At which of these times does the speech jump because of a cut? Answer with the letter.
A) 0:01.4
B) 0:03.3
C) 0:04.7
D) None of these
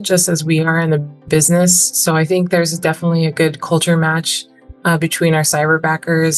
D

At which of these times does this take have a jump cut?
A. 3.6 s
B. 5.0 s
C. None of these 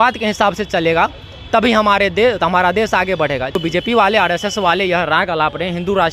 A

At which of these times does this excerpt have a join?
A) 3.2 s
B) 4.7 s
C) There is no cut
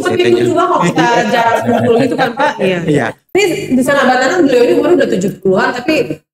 A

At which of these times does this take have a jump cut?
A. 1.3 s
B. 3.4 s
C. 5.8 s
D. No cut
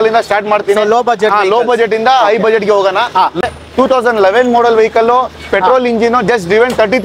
B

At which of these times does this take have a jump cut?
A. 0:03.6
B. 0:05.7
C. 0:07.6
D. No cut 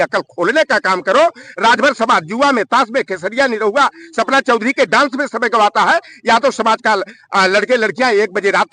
D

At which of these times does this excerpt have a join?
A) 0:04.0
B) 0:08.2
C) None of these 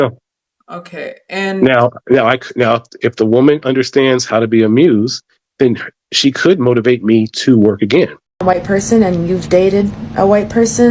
B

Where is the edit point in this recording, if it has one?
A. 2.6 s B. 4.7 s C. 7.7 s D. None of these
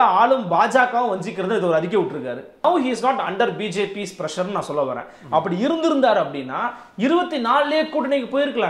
A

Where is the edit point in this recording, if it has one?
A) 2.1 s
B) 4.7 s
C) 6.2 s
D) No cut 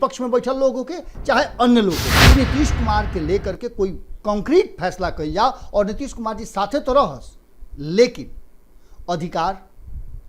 A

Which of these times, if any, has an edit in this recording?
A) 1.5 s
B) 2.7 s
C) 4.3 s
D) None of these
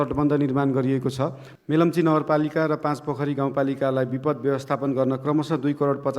A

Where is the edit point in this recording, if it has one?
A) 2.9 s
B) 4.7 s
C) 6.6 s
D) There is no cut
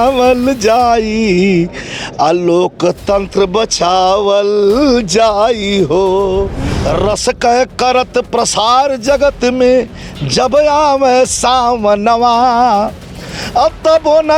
C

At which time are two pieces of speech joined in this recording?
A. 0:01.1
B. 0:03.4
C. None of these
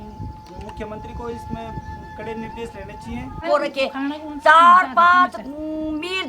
B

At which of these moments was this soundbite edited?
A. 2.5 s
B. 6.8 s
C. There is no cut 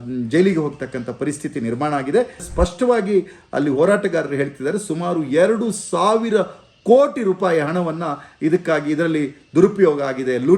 A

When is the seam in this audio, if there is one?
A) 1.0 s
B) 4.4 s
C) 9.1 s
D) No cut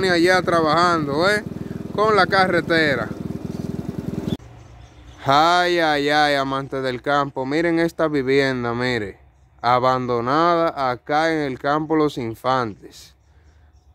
B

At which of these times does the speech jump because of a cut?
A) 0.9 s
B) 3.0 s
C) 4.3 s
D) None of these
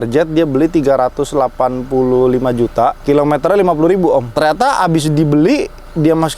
C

